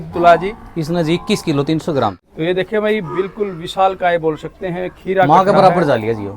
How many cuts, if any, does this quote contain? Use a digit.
1